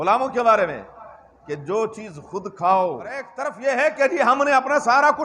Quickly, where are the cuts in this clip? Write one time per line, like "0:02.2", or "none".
0:03.4